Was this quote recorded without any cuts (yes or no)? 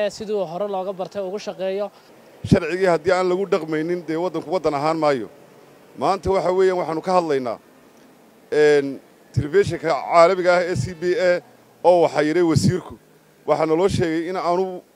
no